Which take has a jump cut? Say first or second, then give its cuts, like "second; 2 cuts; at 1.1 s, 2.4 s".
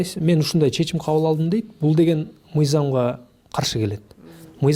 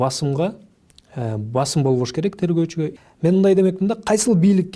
second; 1 cut; at 2.9 s